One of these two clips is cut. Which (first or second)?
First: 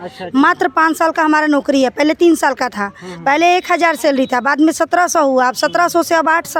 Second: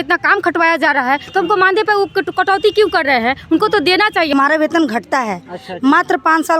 second